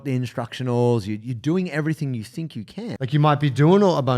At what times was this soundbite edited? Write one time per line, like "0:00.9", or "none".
0:02.9